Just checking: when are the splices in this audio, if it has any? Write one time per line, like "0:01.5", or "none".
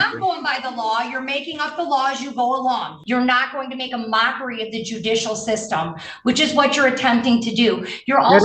0:02.9